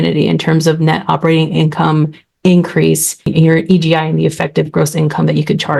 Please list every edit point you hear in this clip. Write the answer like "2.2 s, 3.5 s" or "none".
3.3 s